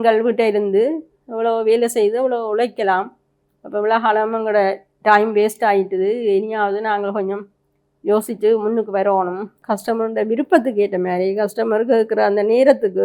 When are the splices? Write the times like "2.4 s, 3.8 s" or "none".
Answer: 9.6 s

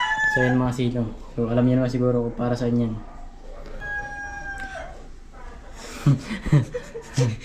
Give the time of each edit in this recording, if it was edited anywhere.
3.8 s

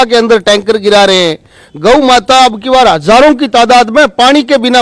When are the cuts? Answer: none

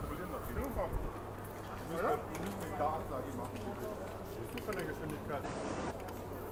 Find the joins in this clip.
none

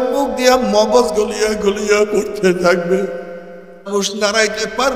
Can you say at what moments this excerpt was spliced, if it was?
3.9 s

